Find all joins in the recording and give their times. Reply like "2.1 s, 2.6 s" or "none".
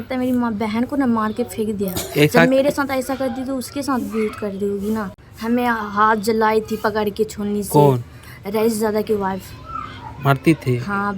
5.1 s